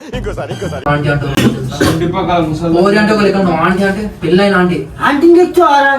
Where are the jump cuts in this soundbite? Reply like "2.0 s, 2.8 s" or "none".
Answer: none